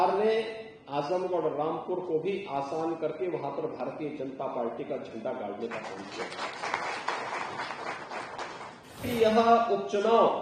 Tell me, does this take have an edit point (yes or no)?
yes